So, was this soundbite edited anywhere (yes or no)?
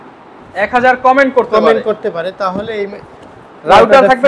no